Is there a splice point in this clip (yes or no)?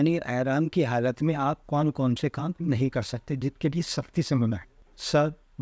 no